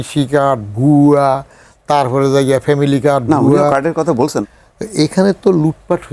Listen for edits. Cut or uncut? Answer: cut